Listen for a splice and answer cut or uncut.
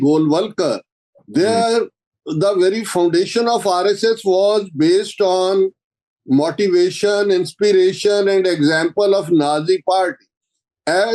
uncut